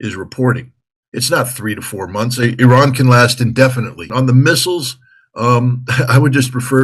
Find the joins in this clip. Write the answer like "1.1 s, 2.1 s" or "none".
4.1 s